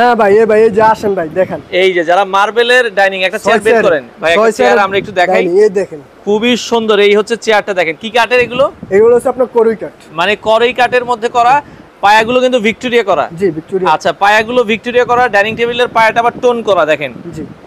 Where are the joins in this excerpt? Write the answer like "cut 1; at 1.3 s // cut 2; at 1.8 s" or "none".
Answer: none